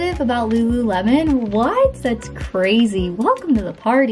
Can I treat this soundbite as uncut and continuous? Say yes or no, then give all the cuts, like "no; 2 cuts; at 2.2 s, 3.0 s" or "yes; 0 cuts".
yes; 0 cuts